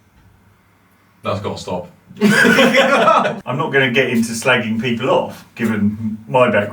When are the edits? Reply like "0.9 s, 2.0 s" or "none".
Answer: 3.4 s